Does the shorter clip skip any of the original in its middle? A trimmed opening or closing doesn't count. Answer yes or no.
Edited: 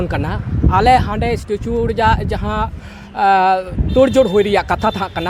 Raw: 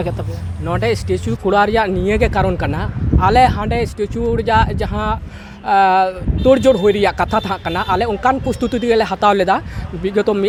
no